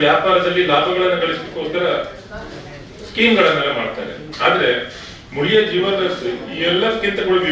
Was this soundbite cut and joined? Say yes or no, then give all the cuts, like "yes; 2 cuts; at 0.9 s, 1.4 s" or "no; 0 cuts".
no; 0 cuts